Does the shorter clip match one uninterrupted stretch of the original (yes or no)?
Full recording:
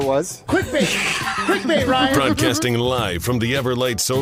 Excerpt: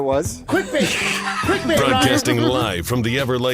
no